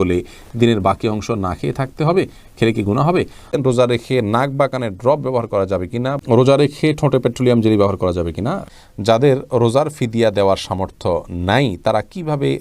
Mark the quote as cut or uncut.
cut